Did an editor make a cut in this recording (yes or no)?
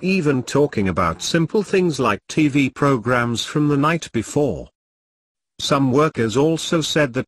yes